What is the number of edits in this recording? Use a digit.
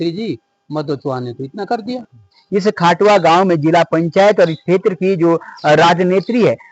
1